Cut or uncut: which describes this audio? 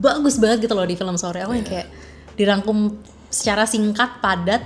uncut